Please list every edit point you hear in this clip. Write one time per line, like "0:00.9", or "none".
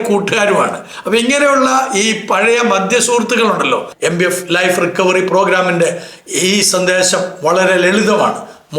0:03.9